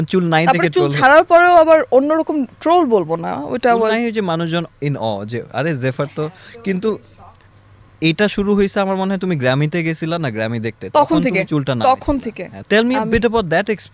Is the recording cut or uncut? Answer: uncut